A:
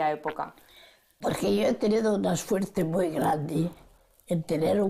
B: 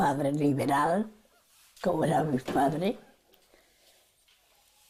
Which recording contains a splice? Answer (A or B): A